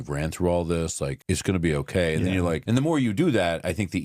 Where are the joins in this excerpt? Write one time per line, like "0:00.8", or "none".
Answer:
0:01.2
0:02.6